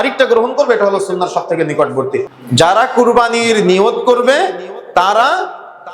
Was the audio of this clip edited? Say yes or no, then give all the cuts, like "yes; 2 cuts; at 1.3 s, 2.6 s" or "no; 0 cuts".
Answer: yes; 1 cut; at 2.3 s